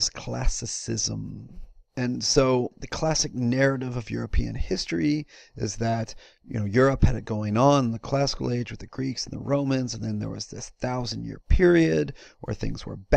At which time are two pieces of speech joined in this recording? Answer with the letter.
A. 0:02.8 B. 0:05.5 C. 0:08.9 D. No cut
B